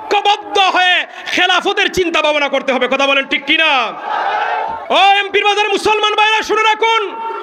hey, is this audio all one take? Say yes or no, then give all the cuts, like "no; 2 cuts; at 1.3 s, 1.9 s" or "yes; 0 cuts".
no; 1 cut; at 4.8 s